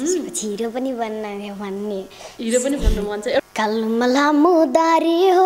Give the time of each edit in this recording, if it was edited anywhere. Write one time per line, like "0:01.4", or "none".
0:03.2